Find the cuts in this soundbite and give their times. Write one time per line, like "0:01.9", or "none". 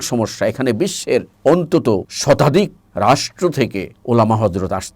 0:01.3
0:02.1
0:02.8
0:03.9